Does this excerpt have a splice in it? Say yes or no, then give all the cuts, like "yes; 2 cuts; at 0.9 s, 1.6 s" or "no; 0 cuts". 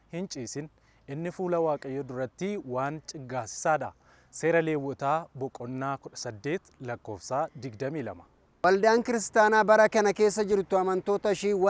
no; 0 cuts